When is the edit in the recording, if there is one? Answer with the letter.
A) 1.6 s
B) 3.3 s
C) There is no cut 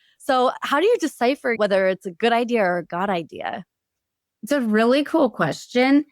A